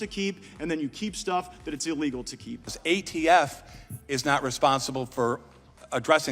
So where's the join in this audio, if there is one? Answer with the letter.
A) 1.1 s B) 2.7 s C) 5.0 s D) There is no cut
B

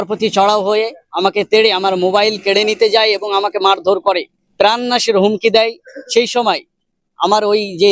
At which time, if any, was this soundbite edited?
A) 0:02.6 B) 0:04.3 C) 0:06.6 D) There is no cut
D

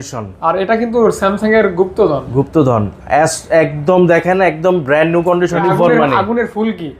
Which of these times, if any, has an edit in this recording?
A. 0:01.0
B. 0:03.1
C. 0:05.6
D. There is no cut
C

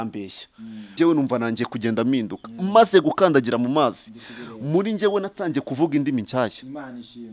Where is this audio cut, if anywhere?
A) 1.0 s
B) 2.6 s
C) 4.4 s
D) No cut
A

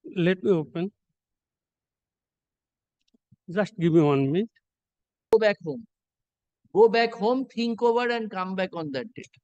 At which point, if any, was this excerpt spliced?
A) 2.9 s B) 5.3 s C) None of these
B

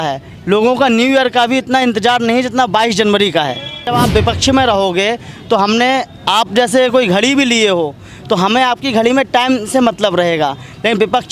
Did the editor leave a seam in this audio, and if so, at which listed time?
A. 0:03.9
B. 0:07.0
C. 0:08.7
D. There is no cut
A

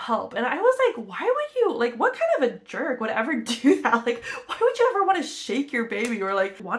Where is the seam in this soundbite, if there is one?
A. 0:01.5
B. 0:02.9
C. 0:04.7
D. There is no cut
D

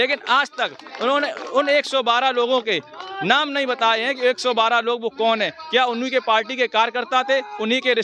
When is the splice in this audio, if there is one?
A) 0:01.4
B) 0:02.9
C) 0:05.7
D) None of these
D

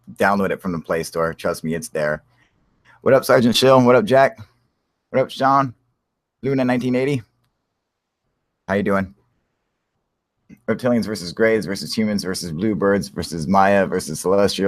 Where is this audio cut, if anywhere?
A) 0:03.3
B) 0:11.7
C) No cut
B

